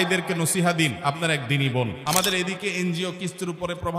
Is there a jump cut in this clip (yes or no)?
yes